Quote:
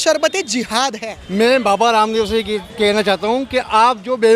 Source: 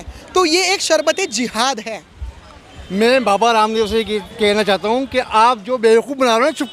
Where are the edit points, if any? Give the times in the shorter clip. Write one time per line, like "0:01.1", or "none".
0:01.1